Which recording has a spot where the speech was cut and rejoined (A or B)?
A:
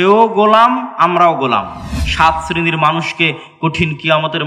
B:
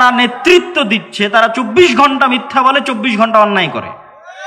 A